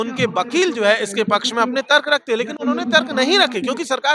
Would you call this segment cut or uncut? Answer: uncut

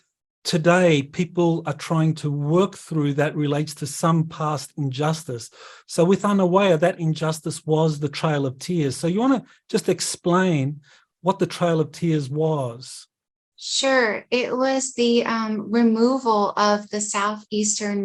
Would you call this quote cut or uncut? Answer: uncut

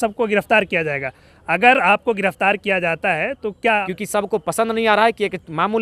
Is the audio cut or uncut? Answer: cut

